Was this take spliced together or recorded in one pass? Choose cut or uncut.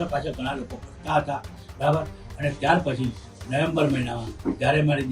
uncut